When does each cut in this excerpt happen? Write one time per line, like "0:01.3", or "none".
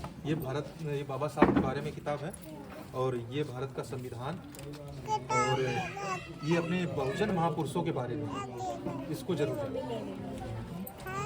none